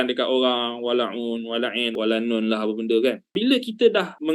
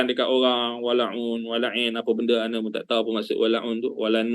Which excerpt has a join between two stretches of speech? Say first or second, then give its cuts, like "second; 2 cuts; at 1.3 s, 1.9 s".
first; 2 cuts; at 1.9 s, 3.3 s